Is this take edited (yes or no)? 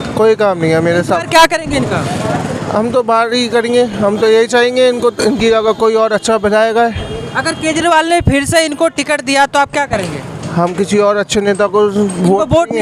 no